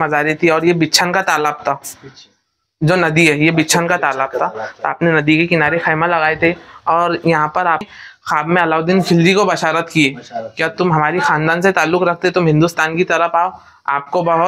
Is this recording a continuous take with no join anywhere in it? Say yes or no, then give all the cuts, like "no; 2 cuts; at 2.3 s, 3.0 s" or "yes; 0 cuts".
no; 1 cut; at 7.9 s